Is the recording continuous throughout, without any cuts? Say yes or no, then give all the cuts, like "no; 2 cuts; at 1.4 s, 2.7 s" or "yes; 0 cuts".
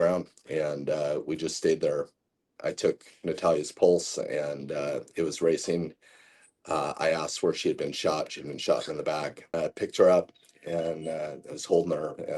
no; 2 cuts; at 2.5 s, 9.5 s